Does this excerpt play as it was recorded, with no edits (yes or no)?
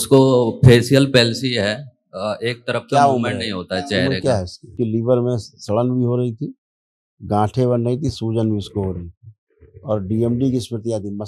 no